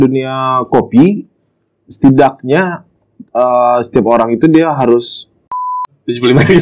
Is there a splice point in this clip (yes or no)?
yes